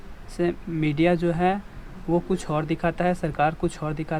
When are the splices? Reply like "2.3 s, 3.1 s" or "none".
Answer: none